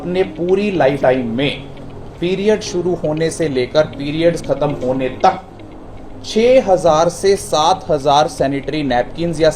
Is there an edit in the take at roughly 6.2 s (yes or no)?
no